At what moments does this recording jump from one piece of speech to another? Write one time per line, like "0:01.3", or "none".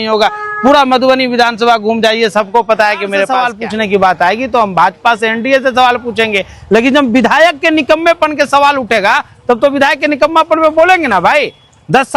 0:03.3